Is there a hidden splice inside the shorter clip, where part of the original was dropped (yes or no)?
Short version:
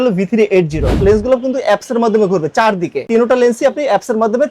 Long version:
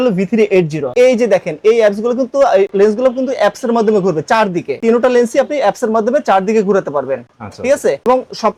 yes